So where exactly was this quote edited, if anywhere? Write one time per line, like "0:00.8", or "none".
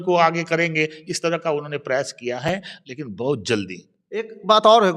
none